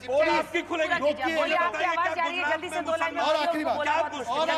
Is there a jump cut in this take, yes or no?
no